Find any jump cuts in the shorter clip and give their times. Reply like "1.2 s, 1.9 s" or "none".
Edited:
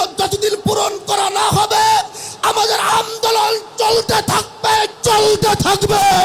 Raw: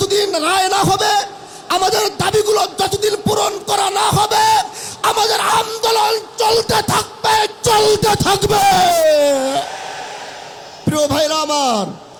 none